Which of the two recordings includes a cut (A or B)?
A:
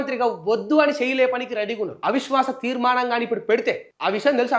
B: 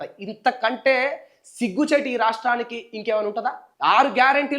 B